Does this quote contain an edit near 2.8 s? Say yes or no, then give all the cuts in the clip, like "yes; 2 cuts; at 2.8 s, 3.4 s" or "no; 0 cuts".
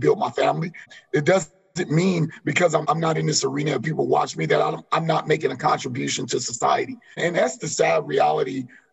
yes; 3 cuts; at 0.9 s, 2.8 s, 7.2 s